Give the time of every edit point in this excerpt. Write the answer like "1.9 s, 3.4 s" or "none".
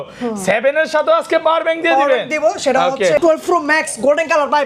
3.2 s